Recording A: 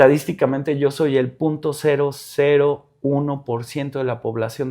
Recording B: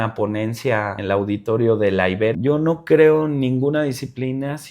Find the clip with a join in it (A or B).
B